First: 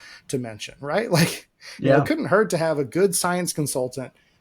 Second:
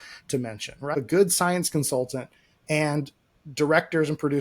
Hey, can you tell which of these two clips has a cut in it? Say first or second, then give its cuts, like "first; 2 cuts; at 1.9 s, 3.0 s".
second; 1 cut; at 0.9 s